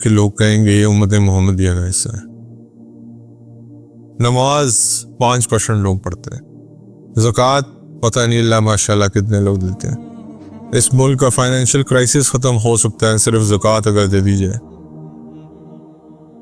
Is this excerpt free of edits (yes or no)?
no